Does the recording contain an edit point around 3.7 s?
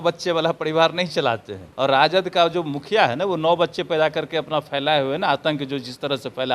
no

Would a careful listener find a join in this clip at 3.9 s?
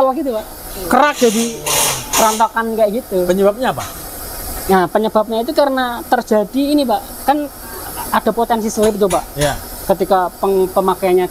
no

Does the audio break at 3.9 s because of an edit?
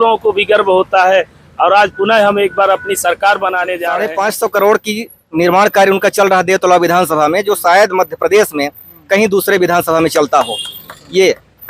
yes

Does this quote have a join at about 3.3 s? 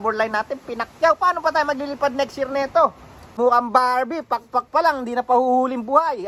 yes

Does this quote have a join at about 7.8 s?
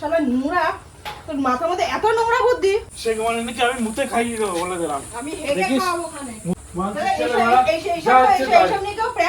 no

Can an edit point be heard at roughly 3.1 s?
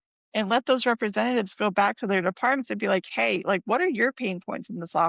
no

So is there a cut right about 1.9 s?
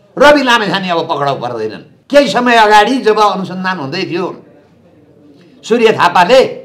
yes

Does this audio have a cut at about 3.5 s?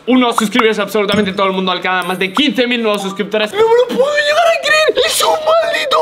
yes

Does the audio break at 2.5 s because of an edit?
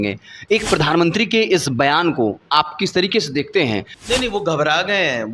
no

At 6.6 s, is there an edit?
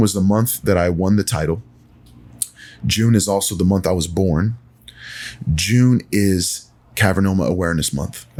no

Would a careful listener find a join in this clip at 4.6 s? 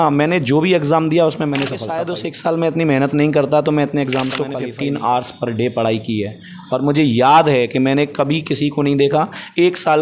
yes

